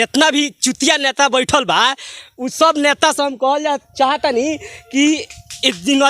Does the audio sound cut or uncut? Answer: uncut